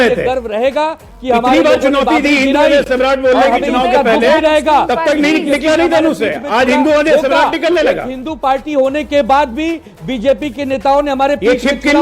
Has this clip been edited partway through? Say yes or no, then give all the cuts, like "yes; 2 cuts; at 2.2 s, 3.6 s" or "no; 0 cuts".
yes; 1 cut; at 2.9 s